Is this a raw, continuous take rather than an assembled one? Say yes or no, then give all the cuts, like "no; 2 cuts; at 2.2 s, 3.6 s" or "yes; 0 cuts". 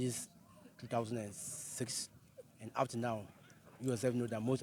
yes; 0 cuts